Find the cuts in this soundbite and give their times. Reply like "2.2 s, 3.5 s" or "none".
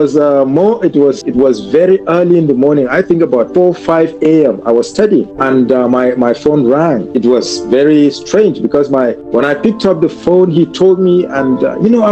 1.2 s, 3.5 s, 5.3 s, 7.1 s, 9.2 s